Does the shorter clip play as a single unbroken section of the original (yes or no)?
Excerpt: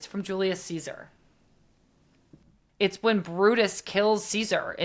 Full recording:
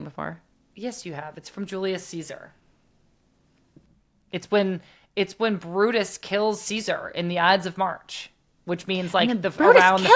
no